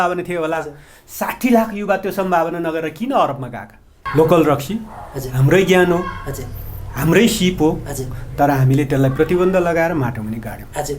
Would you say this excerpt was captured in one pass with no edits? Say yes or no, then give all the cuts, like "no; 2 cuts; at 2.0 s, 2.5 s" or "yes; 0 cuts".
no; 1 cut; at 4.0 s